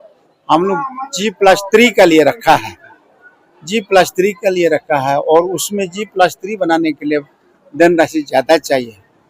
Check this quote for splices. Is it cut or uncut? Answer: uncut